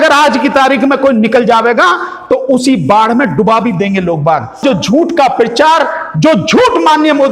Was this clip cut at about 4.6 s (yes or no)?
yes